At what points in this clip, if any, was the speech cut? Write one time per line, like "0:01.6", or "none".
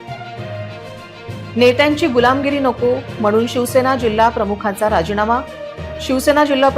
none